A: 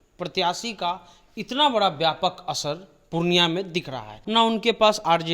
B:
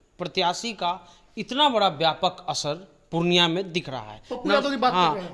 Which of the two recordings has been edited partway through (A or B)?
A